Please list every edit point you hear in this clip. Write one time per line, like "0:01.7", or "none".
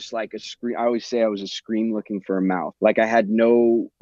0:02.7